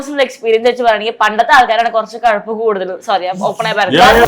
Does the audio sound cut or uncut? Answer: uncut